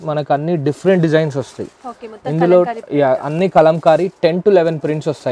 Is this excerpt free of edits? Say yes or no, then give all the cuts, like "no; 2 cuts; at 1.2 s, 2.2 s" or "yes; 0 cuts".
yes; 0 cuts